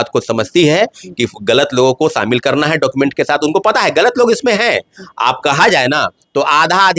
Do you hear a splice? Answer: no; 0 cuts

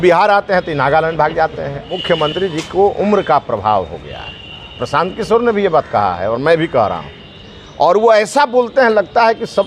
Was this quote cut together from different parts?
yes; 1 cut; at 2.3 s

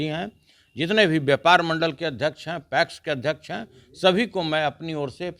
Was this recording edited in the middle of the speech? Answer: no; 0 cuts

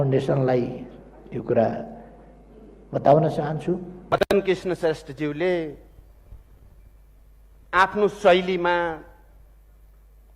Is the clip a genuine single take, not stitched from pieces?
no; 1 cut; at 3.9 s

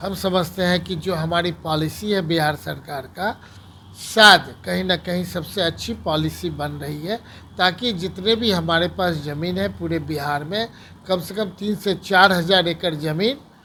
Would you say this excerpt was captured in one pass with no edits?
yes; 0 cuts

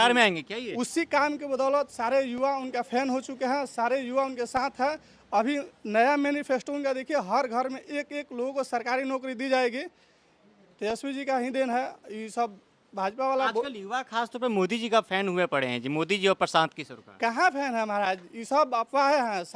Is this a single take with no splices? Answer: yes; 0 cuts

